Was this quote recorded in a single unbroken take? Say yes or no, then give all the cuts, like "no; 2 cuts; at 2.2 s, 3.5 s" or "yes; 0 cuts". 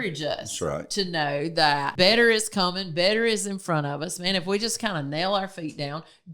no; 1 cut; at 1.9 s